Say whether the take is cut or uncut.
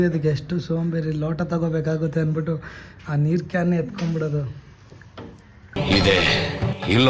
uncut